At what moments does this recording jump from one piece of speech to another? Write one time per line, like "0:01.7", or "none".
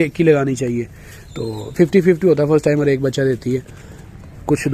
none